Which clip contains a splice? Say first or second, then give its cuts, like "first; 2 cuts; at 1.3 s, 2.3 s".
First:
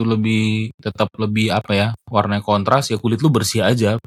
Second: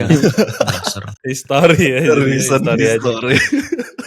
second; 1 cut; at 1.2 s